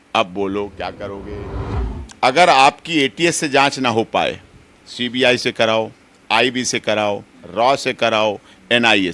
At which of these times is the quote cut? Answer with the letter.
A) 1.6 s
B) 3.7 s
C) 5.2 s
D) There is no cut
A